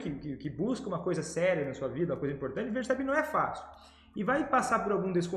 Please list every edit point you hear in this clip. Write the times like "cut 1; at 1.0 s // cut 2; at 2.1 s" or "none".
none